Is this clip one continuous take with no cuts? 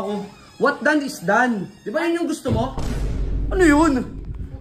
no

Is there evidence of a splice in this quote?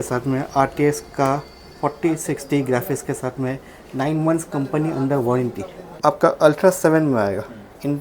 yes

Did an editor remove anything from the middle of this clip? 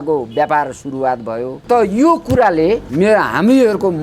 yes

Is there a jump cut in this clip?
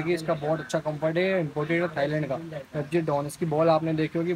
no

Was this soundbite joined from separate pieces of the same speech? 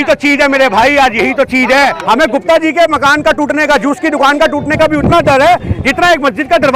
yes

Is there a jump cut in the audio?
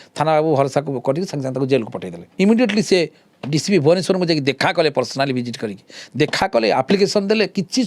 yes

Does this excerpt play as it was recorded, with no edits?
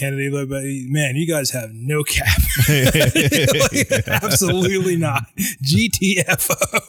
yes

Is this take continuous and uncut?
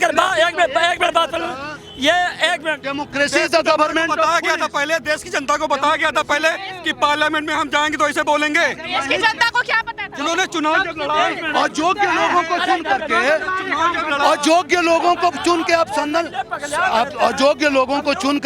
yes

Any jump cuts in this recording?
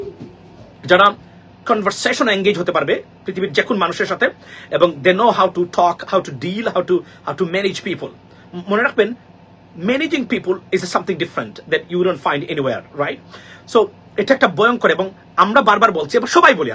no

